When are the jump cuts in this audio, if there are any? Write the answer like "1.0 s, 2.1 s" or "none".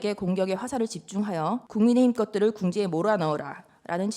1.7 s